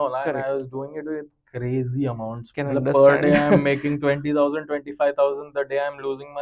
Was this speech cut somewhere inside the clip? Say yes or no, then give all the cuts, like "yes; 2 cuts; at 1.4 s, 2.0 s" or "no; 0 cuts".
yes; 1 cut; at 2.5 s